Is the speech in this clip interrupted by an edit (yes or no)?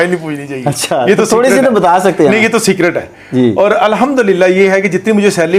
no